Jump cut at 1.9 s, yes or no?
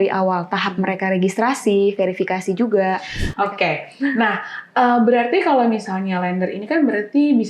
no